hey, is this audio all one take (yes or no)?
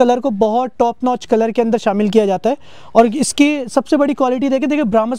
yes